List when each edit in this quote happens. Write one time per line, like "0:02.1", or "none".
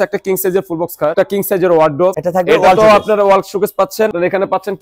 0:01.1
0:02.1
0:04.1